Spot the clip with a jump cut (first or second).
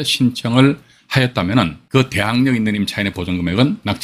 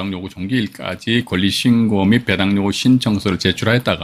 first